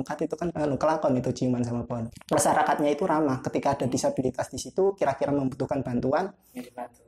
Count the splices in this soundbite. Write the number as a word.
one